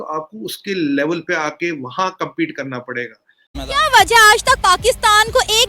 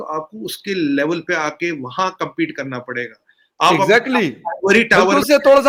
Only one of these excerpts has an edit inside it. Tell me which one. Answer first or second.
first